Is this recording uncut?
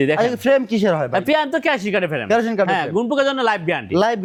yes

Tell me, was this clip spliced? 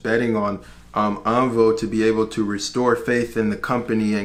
no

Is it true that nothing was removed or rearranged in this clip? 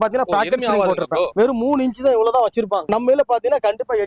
no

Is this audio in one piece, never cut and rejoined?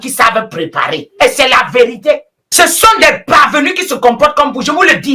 no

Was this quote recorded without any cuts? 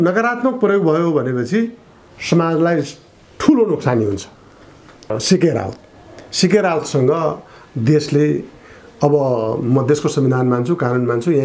no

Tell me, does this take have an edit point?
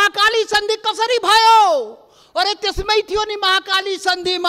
no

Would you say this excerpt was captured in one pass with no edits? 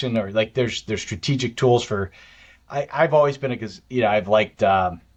yes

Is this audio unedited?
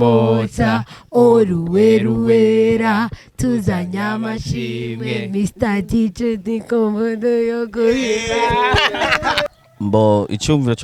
no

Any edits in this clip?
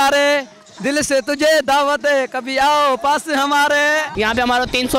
yes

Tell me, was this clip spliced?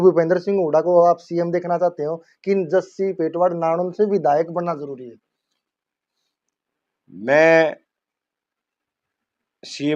no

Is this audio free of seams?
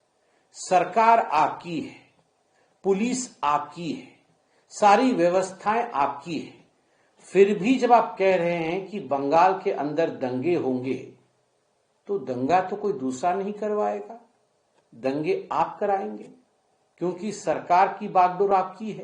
yes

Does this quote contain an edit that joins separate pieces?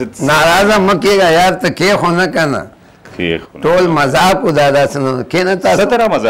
no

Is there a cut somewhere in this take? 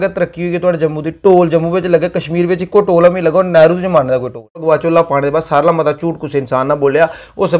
yes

